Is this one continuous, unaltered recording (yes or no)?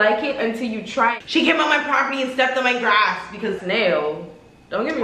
no